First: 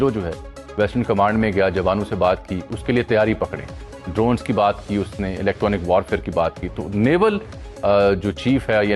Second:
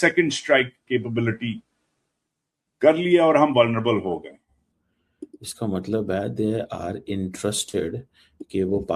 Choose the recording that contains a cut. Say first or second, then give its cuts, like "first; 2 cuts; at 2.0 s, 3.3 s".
second; 1 cut; at 4.3 s